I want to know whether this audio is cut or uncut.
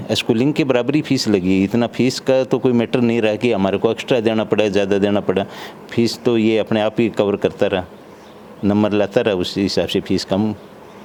uncut